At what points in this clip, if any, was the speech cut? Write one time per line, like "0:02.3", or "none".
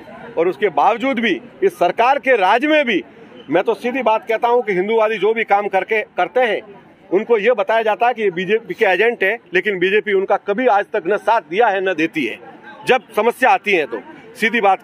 none